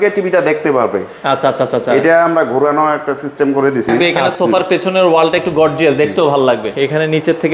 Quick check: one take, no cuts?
no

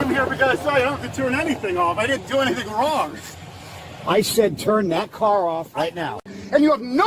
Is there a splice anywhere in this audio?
yes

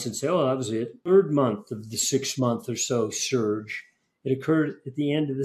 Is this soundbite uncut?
no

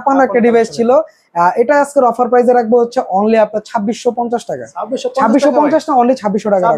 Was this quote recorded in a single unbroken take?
yes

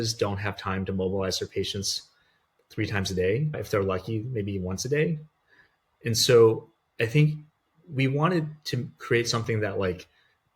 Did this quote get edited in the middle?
no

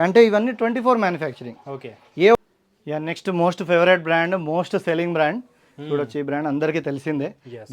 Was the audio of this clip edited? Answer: yes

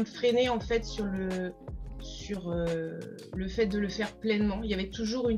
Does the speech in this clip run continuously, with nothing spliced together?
yes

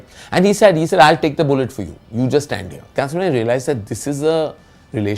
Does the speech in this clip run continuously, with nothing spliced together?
no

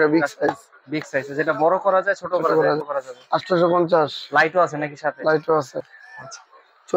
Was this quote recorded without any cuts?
no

